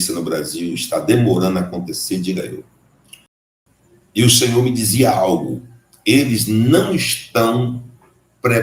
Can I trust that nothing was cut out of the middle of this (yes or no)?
no